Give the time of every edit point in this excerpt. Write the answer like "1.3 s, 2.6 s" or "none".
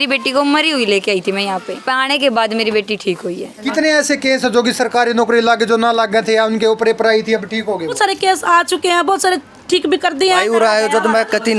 1.8 s, 3.6 s, 7.9 s, 10.4 s